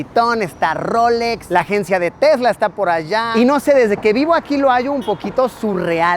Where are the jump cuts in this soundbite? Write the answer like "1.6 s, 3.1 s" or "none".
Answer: 1.4 s, 3.3 s